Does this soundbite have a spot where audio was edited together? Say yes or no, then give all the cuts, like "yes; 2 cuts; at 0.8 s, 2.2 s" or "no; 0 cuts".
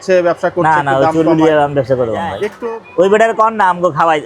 yes; 1 cut; at 2.5 s